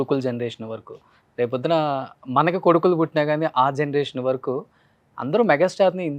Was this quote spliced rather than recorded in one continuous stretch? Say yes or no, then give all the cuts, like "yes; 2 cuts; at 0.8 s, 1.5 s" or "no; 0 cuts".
no; 0 cuts